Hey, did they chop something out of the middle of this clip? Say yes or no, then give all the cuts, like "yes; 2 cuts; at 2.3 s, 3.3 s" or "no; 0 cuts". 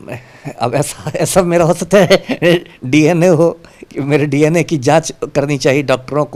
no; 0 cuts